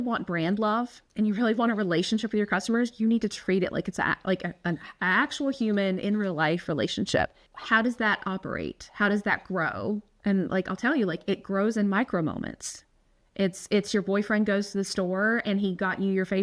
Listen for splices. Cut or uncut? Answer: cut